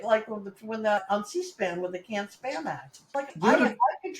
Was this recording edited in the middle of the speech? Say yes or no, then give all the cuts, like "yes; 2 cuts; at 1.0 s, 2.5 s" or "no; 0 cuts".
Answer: yes; 2 cuts; at 1.0 s, 2.9 s